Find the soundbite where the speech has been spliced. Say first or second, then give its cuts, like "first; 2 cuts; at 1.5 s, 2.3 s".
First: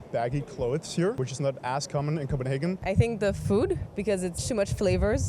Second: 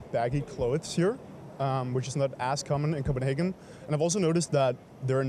first; 2 cuts; at 1.2 s, 2.8 s